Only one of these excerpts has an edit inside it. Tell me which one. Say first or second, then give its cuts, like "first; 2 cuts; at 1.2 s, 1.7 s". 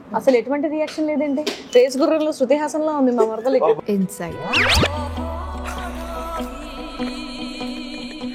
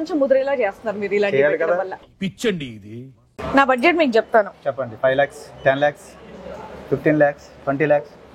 second; 1 cut; at 3.3 s